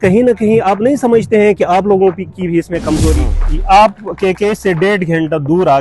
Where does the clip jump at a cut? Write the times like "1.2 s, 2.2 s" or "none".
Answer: 3.3 s